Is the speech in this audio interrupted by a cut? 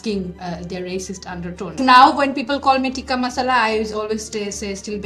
yes; 1 cut; at 1.7 s

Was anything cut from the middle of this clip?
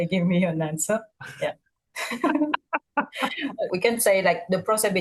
no; 0 cuts

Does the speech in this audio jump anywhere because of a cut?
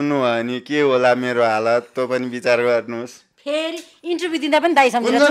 no; 0 cuts

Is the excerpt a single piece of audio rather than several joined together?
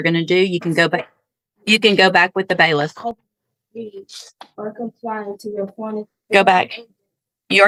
yes; 0 cuts

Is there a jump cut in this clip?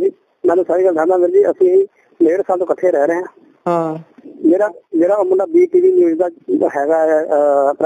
no; 0 cuts

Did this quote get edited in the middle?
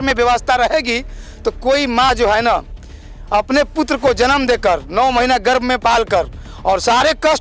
no; 0 cuts

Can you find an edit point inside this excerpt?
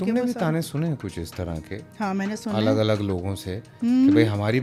no; 0 cuts

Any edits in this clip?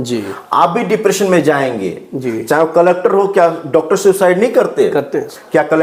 no; 0 cuts

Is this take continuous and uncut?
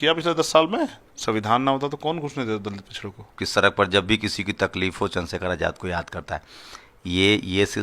no; 2 cuts; at 1.1 s, 3.4 s

